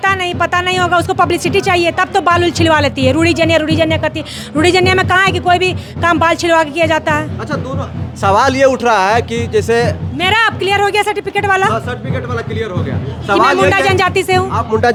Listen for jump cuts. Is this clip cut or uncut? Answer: uncut